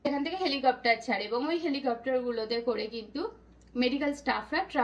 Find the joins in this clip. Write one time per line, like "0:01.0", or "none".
none